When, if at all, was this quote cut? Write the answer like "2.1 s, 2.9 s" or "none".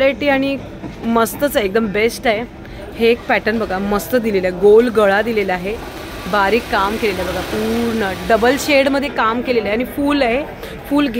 none